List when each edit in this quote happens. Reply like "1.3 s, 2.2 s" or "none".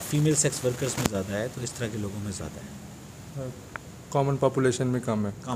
none

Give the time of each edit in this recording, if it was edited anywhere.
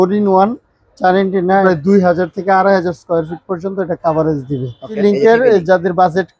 1.6 s, 5.0 s

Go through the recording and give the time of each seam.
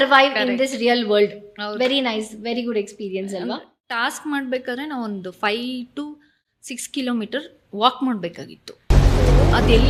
none

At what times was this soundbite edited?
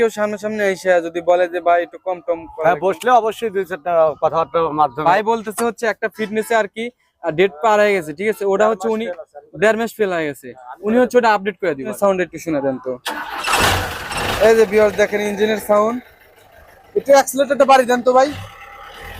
5.0 s, 11.9 s

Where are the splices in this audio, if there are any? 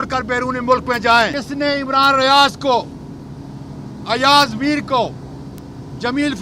1.3 s

